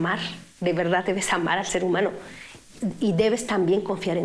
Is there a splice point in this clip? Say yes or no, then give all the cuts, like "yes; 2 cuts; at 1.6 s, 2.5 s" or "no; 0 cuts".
no; 0 cuts